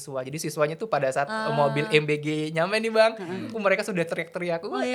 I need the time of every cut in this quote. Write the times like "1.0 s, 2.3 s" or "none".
none

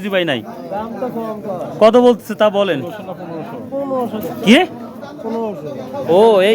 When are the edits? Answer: none

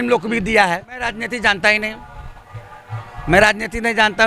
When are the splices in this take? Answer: 1.2 s

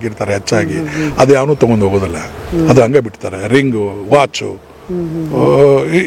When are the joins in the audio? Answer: none

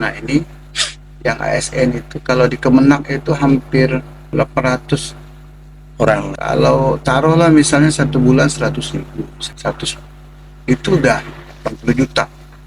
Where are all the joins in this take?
4.3 s, 6.3 s, 9.4 s

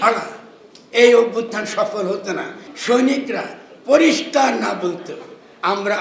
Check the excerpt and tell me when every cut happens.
2.7 s

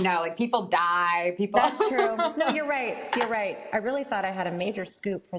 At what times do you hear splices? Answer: none

